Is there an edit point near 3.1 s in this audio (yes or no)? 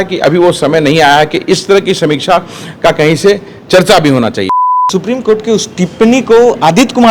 no